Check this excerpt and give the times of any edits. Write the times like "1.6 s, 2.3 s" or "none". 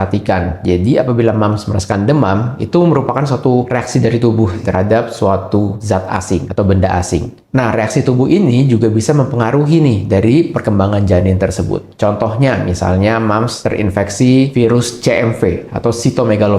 3.7 s, 4.6 s, 6.1 s, 11.9 s

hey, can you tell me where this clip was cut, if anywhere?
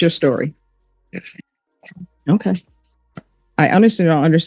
3.4 s

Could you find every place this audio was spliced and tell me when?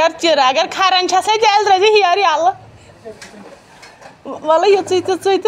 none

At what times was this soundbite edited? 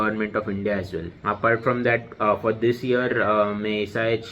1.1 s

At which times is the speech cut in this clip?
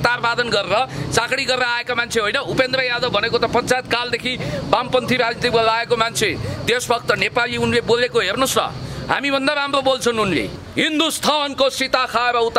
10.5 s

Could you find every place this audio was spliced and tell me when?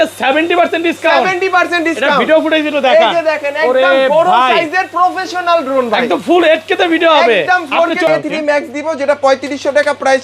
8.1 s

